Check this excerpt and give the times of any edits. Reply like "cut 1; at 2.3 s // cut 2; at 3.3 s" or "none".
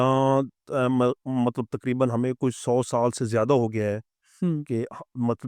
none